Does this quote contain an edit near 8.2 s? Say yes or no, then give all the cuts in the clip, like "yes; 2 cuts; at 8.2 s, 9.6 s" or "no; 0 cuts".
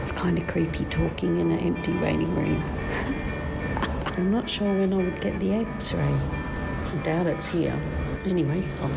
yes; 3 cuts; at 4.1 s, 6.6 s, 8.2 s